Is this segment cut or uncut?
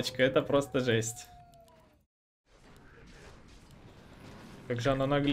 cut